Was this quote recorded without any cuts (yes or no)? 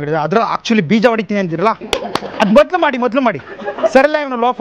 yes